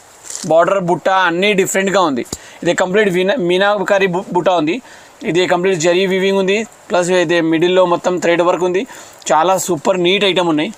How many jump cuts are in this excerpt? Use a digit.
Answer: 0